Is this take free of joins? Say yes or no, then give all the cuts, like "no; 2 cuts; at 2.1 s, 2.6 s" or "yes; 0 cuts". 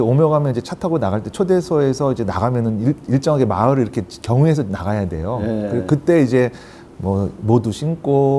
yes; 0 cuts